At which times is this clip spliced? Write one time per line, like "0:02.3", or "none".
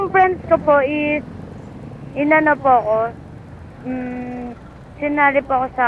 none